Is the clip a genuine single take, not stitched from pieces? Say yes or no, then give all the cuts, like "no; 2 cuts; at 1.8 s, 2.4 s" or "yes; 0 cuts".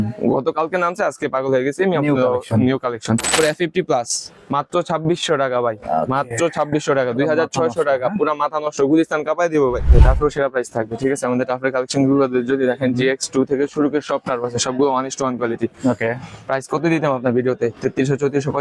no; 2 cuts; at 3.3 s, 9.9 s